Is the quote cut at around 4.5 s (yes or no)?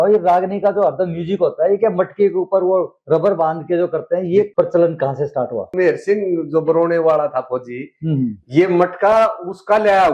yes